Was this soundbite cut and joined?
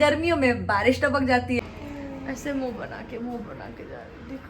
yes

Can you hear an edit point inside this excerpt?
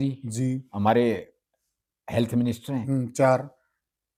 no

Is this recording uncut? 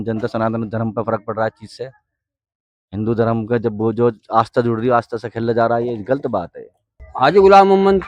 no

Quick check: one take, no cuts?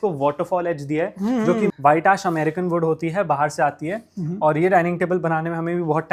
no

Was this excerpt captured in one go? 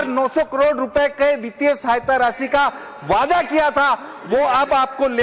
yes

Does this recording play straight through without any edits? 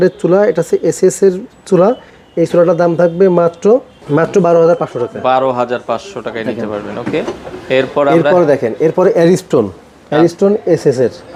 yes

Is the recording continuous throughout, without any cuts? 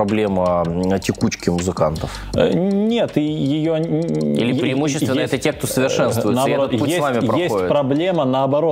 yes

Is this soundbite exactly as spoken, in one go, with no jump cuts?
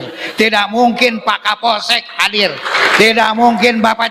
yes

